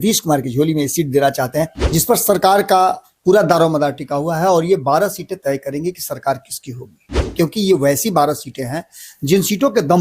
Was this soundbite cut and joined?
yes; 1 cut; at 1.8 s

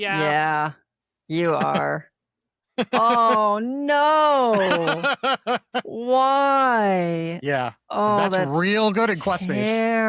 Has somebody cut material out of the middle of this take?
no; 0 cuts

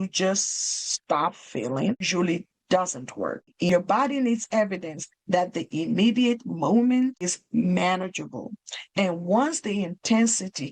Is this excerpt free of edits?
no; 3 cuts; at 2.1 s, 3.5 s, 7.4 s

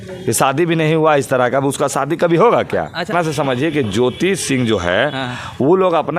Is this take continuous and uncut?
no; 1 cut; at 3.1 s

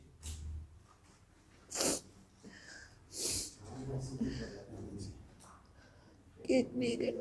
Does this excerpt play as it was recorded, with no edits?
yes; 0 cuts

